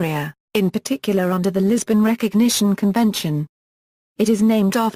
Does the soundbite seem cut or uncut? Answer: uncut